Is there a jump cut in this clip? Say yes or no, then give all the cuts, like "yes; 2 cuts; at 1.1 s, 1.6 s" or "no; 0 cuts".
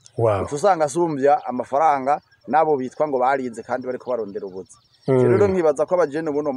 no; 0 cuts